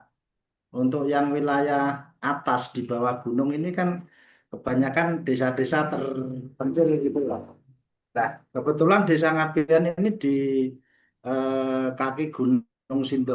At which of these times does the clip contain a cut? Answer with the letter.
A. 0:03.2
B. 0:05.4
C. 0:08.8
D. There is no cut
D